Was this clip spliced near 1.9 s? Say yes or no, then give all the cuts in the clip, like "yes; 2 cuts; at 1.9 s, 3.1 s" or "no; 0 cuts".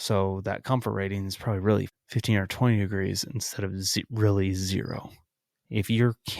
yes; 1 cut; at 1.9 s